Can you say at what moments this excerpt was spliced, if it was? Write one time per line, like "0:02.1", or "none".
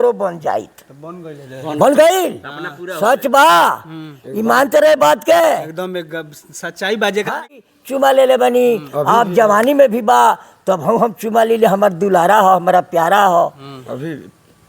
0:07.6